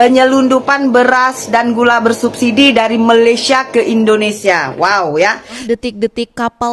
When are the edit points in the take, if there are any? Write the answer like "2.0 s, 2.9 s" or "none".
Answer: 5.6 s